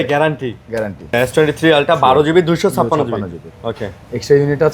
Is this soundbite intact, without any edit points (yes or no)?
no